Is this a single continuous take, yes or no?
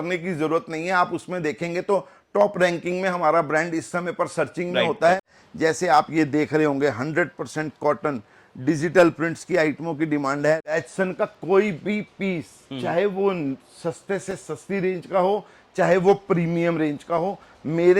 no